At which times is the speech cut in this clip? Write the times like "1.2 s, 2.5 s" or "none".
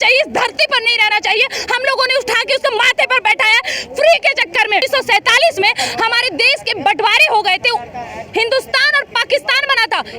4.9 s